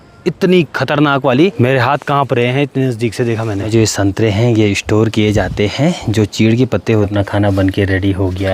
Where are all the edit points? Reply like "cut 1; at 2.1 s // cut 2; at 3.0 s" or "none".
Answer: cut 1; at 1.6 s // cut 2; at 3.7 s // cut 3; at 7.1 s